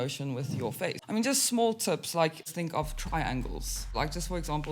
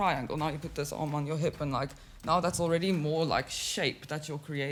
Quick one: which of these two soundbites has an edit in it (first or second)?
first